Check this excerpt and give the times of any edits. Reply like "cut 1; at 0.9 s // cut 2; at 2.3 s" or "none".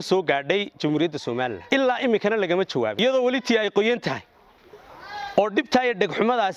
cut 1; at 1.6 s // cut 2; at 3.0 s